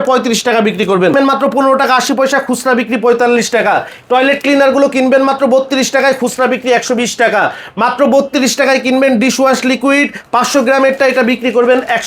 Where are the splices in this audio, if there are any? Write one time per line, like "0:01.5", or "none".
0:01.1